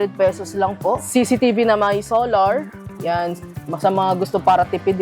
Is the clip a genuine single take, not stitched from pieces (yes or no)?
no